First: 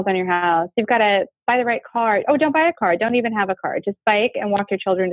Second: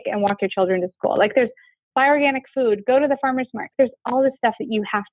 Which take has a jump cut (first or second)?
second